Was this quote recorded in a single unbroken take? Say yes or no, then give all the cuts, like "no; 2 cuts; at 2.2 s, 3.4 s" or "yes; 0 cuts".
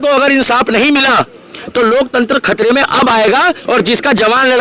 no; 1 cut; at 3.6 s